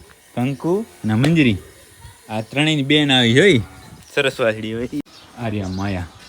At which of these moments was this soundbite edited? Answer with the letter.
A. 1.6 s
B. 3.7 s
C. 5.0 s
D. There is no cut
C